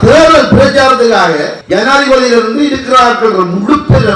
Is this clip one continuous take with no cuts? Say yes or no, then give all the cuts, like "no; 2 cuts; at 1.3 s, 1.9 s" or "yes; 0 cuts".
no; 1 cut; at 1.5 s